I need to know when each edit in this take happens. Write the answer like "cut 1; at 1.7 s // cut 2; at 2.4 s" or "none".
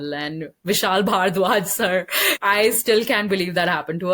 cut 1; at 2.4 s